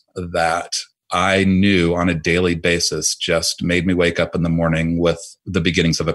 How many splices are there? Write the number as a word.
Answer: zero